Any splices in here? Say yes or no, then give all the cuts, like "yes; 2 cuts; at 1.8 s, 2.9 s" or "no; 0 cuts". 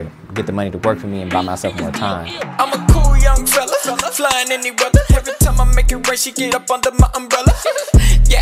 yes; 1 cut; at 2.3 s